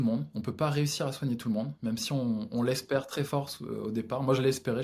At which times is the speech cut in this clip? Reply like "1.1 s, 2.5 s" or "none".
none